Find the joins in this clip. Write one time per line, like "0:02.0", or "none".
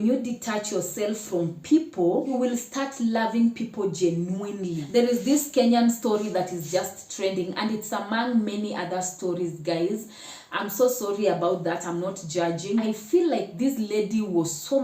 0:02.3
0:04.8
0:12.8